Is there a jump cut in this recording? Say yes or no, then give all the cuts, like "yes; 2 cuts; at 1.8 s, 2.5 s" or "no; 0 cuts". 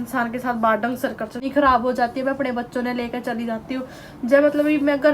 yes; 1 cut; at 1.4 s